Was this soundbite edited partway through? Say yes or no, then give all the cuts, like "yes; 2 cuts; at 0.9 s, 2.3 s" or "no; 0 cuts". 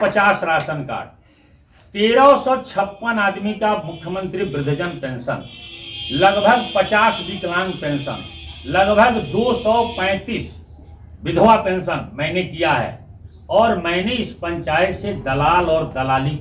no; 0 cuts